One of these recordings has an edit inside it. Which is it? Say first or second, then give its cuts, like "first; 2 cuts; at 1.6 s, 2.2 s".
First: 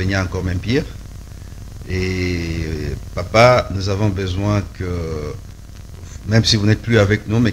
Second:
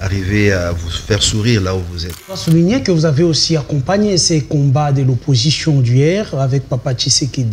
second; 1 cut; at 2.4 s